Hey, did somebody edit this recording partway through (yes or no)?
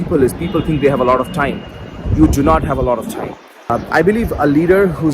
yes